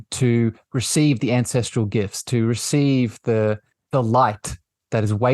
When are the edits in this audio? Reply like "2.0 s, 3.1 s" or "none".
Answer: 3.7 s